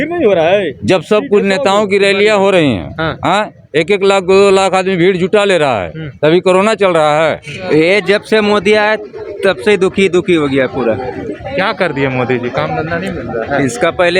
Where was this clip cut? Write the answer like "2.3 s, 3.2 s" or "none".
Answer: 7.5 s